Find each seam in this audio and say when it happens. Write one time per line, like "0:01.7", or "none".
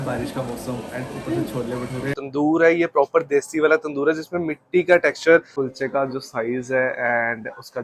0:02.2
0:05.5